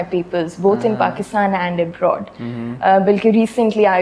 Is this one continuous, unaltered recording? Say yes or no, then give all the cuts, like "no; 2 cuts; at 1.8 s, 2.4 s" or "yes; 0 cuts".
yes; 0 cuts